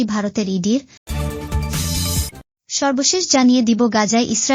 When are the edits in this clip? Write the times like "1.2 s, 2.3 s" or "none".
0.9 s, 2.4 s